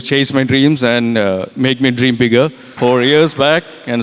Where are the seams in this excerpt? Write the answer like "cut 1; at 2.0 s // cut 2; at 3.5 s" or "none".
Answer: cut 1; at 2.6 s